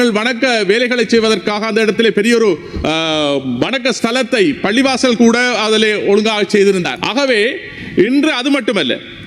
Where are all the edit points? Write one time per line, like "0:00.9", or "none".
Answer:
none